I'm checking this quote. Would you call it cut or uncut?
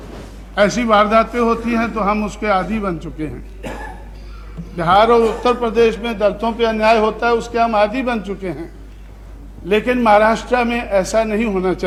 uncut